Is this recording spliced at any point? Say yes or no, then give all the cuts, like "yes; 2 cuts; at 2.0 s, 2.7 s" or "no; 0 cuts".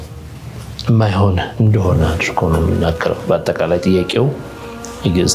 no; 0 cuts